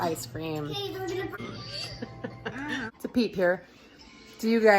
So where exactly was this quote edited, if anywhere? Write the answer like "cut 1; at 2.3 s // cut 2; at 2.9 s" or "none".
cut 1; at 1.4 s // cut 2; at 2.9 s